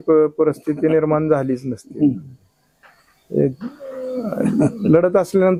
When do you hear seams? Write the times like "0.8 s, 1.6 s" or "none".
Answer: none